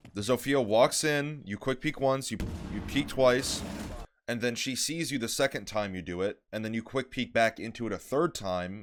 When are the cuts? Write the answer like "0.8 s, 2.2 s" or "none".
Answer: none